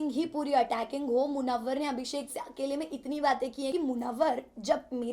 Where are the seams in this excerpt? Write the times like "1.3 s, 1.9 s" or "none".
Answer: 3.7 s